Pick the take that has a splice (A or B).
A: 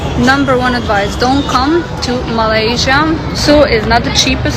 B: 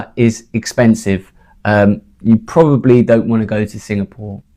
A